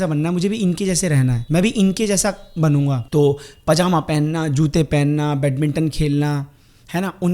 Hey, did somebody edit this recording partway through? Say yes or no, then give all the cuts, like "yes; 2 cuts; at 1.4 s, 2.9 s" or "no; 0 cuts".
yes; 2 cuts; at 1.4 s, 3.0 s